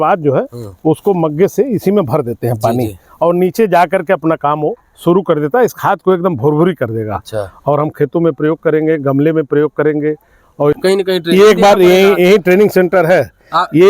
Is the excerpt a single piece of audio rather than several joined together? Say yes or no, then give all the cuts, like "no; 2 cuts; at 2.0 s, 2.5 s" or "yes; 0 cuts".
no; 1 cut; at 10.8 s